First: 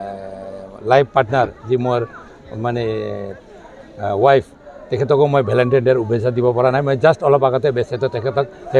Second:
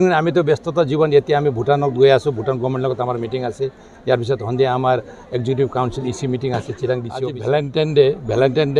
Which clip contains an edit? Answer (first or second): second